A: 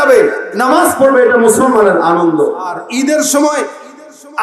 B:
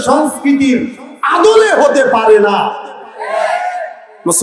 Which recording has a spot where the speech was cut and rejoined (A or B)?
A